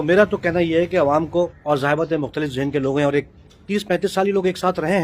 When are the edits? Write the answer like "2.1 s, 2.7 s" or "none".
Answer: 1.6 s